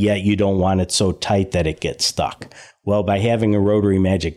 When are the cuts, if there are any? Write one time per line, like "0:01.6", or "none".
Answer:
none